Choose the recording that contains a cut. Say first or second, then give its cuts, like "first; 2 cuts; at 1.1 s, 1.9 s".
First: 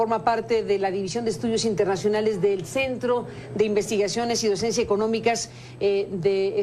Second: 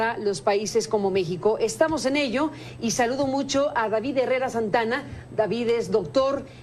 first; 1 cut; at 4.3 s